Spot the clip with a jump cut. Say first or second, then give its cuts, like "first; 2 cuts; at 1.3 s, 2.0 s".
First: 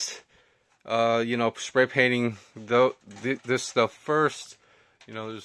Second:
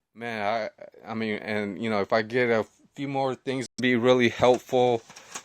second; 1 cut; at 3.8 s